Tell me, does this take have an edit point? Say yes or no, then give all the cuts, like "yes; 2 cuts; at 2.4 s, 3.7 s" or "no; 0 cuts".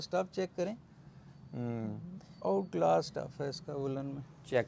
no; 0 cuts